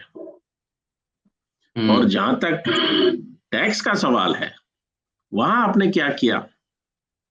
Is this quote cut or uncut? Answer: uncut